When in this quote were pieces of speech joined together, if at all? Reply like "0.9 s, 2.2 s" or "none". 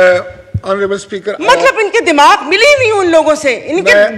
none